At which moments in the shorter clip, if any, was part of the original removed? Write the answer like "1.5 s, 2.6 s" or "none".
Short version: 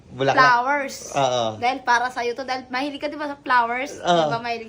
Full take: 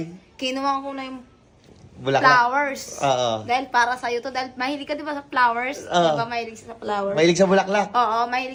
none